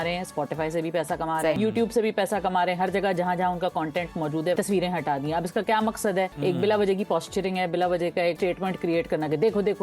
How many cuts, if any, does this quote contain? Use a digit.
4